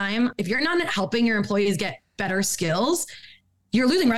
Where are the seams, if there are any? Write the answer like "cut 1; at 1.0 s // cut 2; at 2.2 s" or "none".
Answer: none